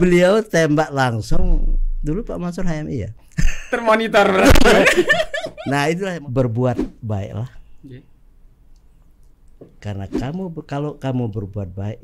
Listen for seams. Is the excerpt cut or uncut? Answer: cut